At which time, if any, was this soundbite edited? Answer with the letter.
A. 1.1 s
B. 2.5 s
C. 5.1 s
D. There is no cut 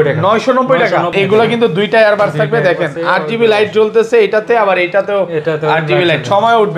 A